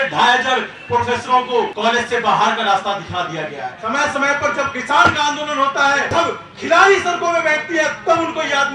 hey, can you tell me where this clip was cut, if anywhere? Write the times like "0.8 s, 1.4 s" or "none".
1.7 s, 3.8 s, 6.1 s